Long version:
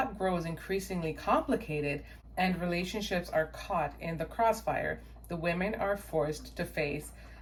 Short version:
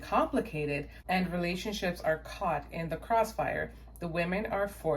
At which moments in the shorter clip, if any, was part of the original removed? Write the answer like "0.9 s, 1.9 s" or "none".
0.9 s